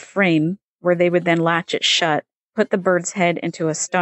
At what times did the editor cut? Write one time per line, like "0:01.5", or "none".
0:02.4